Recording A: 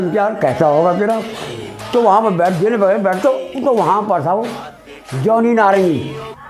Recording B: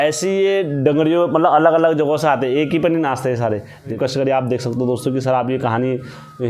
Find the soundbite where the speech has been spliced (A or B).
B